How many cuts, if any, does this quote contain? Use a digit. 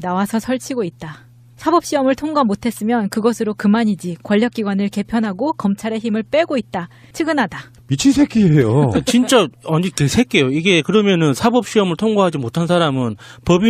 1